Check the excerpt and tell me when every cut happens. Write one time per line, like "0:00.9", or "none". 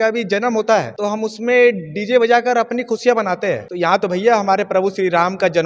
0:00.9
0:03.7